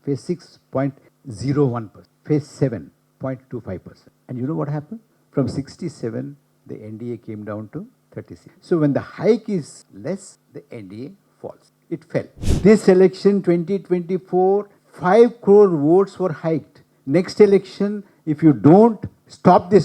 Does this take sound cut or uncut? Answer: cut